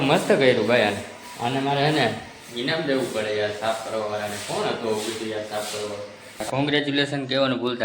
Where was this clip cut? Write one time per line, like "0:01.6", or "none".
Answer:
0:04.8
0:06.4